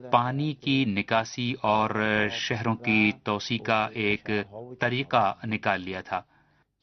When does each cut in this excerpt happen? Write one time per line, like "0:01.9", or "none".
none